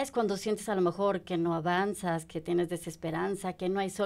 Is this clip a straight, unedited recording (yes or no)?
yes